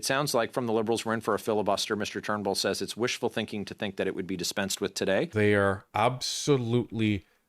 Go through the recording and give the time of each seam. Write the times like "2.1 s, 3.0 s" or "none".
5.3 s